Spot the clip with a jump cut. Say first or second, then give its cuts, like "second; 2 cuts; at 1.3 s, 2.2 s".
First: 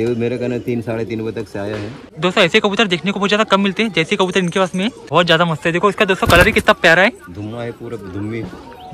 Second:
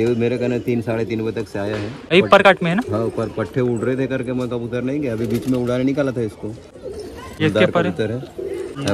first; 2 cuts; at 2.0 s, 5.0 s